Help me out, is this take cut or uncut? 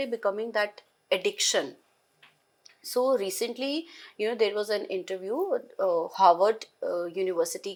uncut